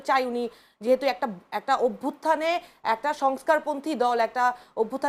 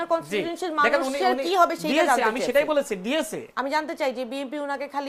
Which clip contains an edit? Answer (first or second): second